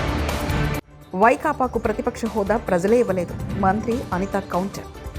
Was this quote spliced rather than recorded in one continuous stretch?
yes; 1 cut; at 0.9 s

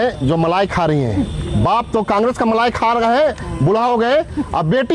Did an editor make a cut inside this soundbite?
no; 0 cuts

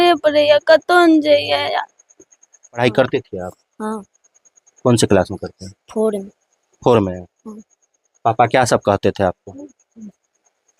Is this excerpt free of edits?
no; 1 cut; at 2.8 s

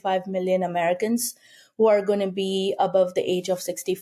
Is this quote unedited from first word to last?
yes; 0 cuts

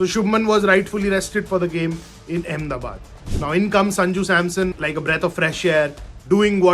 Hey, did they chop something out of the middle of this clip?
no; 0 cuts

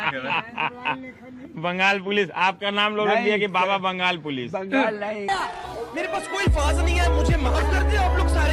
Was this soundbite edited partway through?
yes; 1 cut; at 5.3 s

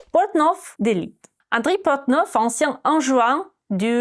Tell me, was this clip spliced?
yes; 1 cut; at 1.0 s

